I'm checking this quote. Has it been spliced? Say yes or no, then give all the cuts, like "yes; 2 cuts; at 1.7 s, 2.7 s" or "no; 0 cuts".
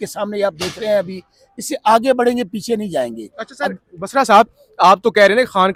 no; 0 cuts